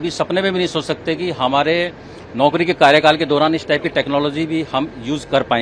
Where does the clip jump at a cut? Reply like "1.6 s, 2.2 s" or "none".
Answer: none